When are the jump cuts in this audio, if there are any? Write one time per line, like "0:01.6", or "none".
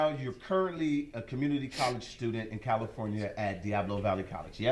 none